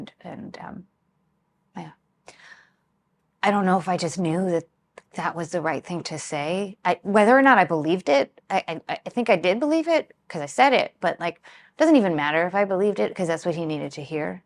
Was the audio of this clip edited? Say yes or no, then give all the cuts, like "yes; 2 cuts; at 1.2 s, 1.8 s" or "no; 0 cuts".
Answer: no; 0 cuts